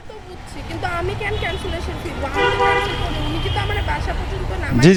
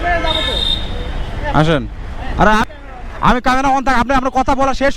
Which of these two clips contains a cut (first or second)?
second